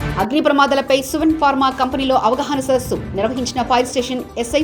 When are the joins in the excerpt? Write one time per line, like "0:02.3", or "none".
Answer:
none